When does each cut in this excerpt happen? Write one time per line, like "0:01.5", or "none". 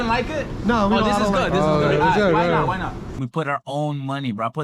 0:03.2